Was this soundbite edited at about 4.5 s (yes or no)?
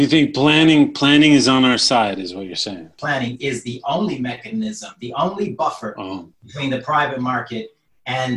no